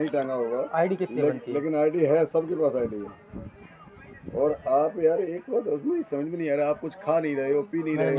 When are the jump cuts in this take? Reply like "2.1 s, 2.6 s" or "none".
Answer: none